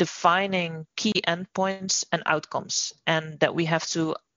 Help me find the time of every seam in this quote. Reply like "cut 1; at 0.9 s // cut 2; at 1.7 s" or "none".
none